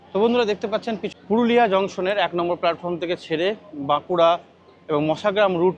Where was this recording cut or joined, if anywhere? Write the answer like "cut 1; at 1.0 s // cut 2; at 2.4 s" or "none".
cut 1; at 1.1 s